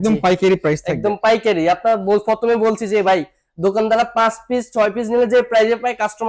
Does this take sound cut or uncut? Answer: uncut